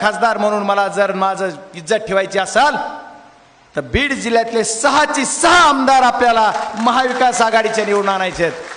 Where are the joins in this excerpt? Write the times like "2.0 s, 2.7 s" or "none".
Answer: none